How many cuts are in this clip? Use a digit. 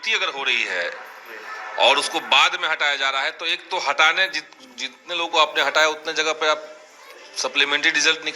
0